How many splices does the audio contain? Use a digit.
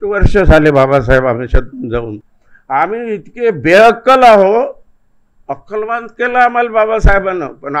0